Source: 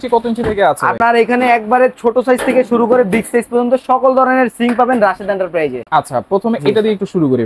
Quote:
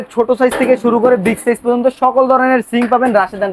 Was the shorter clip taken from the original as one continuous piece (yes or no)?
yes